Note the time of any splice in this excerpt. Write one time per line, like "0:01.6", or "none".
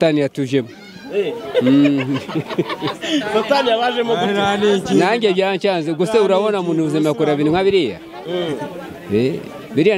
none